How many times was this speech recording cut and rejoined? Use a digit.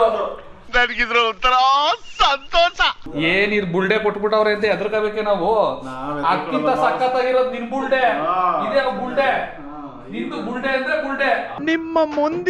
1